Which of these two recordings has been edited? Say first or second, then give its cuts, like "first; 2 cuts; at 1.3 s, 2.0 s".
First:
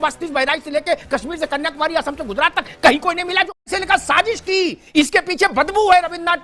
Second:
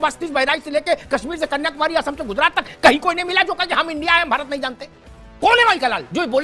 first; 1 cut; at 3.7 s